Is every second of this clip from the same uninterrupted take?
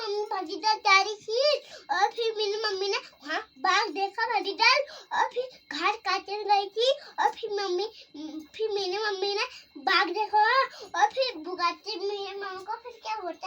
yes; 0 cuts

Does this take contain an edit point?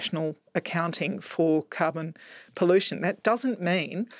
no; 0 cuts

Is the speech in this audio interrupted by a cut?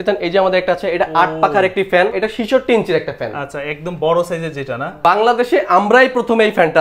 yes; 2 cuts; at 2.1 s, 5.0 s

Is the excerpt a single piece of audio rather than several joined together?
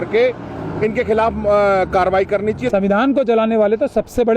no; 1 cut; at 2.6 s

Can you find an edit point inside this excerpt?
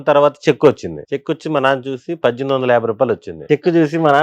yes; 2 cuts; at 0.9 s, 3.5 s

